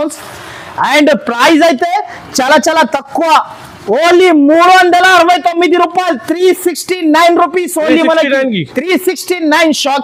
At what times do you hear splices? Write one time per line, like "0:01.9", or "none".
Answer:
none